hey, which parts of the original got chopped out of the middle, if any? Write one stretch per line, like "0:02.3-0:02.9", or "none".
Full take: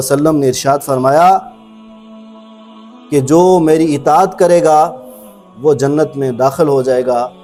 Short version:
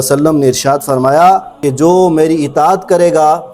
0:01.5-0:03.0